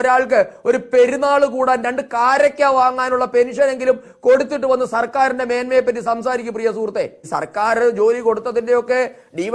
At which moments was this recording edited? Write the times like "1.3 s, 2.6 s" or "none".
7.2 s